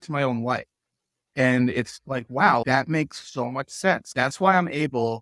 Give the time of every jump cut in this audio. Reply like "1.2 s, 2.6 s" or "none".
1.3 s, 2.6 s, 4.1 s

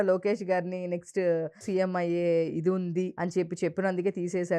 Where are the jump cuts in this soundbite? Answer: 1.6 s, 3.1 s

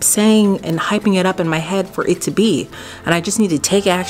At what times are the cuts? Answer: none

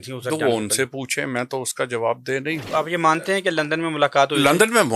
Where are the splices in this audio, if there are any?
2.7 s

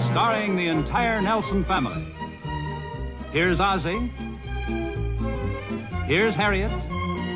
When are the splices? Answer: none

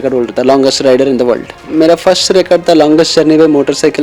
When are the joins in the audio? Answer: 1.7 s

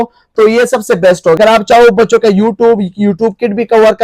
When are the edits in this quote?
1.4 s

